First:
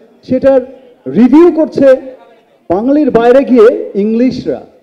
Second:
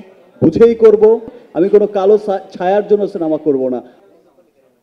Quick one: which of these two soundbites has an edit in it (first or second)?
second